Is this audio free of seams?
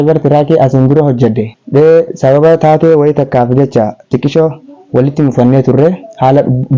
no; 1 cut; at 1.5 s

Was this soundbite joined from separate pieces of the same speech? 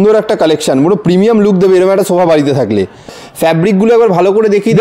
yes; 1 cut; at 3.0 s

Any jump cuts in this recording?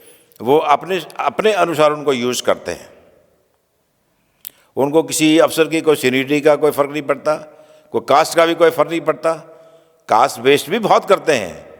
no; 0 cuts

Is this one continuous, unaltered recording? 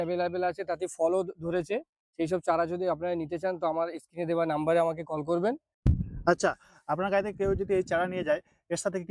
no; 1 cut; at 5.7 s

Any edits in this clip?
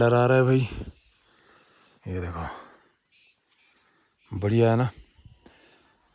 no; 0 cuts

